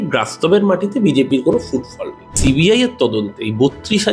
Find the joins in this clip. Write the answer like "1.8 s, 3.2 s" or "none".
2.4 s

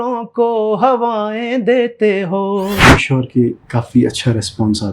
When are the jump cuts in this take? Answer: 2.8 s

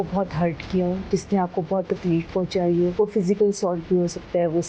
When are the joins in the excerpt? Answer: 2.9 s

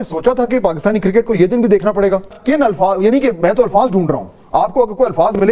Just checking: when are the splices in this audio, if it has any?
none

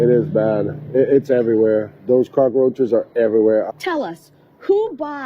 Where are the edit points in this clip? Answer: 3.7 s

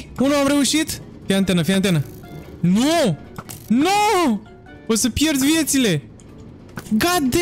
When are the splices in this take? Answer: none

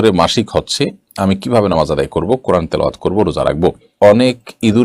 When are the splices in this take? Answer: 3.9 s

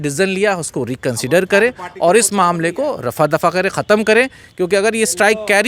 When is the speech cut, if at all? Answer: none

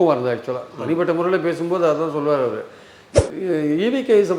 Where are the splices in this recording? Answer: 3.1 s

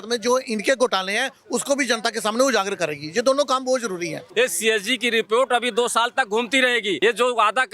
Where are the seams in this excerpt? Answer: 4.2 s, 7.0 s

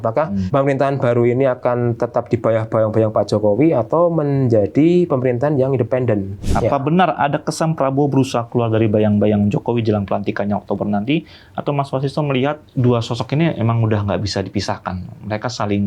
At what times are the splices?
6.4 s

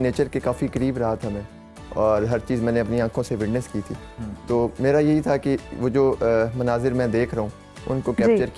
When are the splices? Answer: none

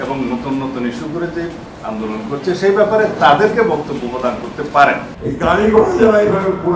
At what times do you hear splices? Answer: 5.1 s

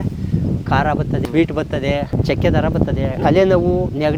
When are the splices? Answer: 1.3 s, 2.1 s, 3.2 s

